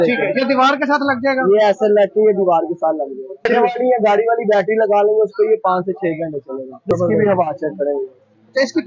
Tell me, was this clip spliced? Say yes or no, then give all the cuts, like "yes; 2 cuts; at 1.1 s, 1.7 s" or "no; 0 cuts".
yes; 2 cuts; at 3.5 s, 6.8 s